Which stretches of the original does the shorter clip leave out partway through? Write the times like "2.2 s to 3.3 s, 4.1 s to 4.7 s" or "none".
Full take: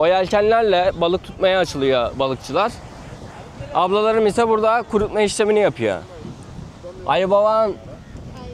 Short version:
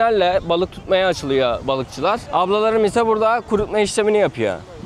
2.8 s to 3.7 s